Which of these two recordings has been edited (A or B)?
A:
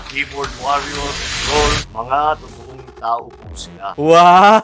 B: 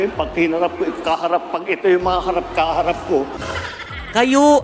B